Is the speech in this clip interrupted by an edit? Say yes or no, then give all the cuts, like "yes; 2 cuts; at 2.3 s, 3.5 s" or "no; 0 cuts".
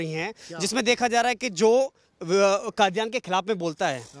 no; 0 cuts